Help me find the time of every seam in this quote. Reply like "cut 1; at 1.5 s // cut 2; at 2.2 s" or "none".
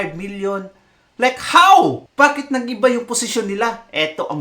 cut 1; at 2.0 s